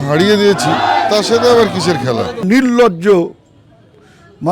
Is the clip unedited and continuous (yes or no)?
no